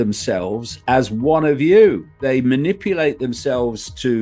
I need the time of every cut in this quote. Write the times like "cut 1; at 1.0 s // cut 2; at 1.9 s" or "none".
cut 1; at 2.2 s